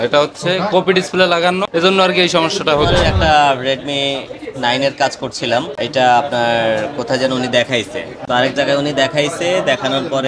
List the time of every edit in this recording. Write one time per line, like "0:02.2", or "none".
0:01.7
0:02.9
0:08.1